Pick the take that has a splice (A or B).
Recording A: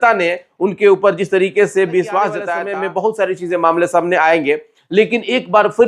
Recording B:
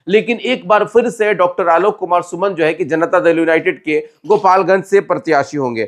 A